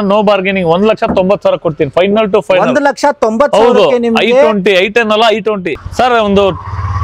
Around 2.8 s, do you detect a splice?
no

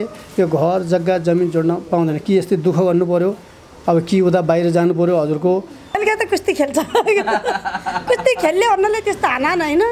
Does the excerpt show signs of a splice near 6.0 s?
yes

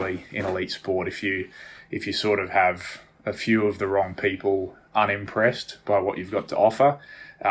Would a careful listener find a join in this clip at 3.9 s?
no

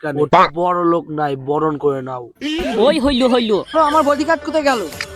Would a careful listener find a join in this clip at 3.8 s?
yes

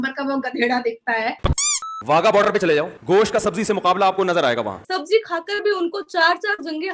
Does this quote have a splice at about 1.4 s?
yes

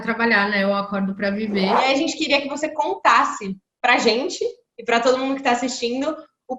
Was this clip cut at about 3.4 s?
no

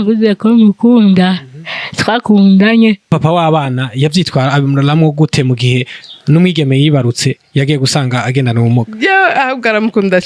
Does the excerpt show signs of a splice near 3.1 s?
yes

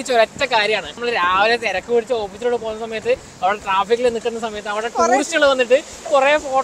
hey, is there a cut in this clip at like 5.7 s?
no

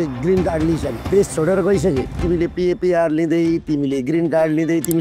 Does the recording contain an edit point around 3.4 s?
no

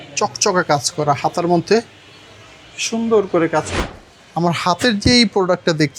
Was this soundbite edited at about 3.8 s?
yes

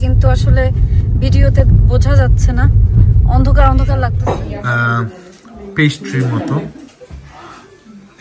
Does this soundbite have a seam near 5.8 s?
no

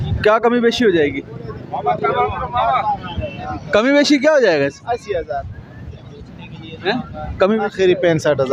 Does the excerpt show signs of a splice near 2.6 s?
no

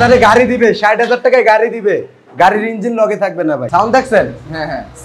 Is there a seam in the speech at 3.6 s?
yes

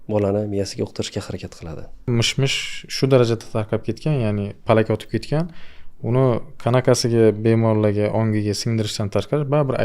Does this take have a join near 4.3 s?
no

